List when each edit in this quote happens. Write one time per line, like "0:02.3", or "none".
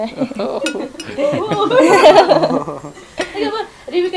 none